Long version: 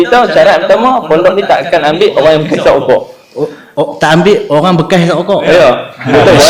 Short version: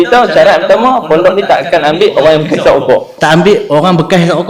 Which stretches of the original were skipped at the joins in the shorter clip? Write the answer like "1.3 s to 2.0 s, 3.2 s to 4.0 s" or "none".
3.1 s to 3.9 s